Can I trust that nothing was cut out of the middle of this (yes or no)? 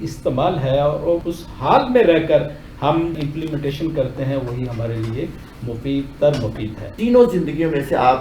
no